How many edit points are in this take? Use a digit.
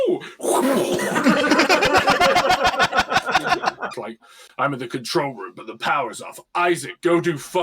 1